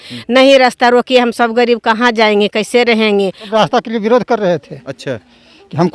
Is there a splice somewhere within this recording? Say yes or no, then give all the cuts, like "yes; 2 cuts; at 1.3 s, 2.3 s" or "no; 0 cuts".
yes; 1 cut; at 3.5 s